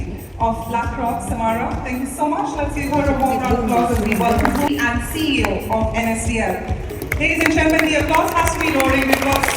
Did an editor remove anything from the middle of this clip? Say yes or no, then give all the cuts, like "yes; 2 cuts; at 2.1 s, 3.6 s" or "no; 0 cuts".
yes; 1 cut; at 4.7 s